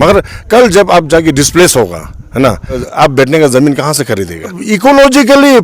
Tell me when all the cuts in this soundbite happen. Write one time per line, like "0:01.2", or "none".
0:02.9
0:04.6